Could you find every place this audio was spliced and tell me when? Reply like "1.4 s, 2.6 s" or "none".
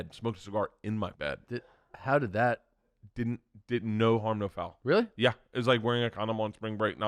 1.1 s